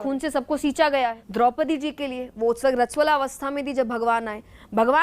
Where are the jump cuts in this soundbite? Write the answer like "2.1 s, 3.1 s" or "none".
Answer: 1.2 s